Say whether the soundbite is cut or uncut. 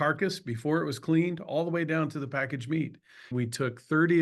cut